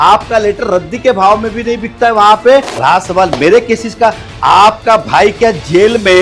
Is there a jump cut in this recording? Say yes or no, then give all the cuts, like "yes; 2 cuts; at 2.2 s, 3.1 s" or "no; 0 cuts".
yes; 1 cut; at 2.7 s